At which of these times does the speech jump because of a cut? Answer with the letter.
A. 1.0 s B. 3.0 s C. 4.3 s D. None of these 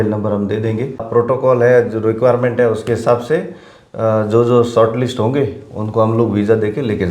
A